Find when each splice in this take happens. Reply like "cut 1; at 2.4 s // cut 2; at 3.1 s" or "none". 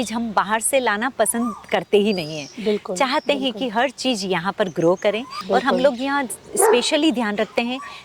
cut 1; at 5.4 s